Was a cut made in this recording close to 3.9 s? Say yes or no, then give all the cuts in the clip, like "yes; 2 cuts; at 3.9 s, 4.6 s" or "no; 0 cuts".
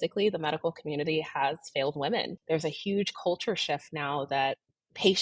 no; 1 cut; at 2.3 s